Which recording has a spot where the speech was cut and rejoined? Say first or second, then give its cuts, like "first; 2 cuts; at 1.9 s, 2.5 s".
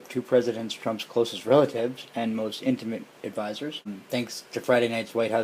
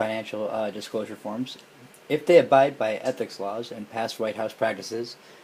first; 1 cut; at 3.9 s